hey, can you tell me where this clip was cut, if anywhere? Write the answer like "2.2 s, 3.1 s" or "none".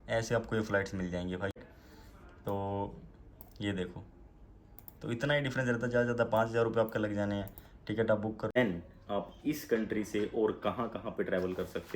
1.6 s, 8.6 s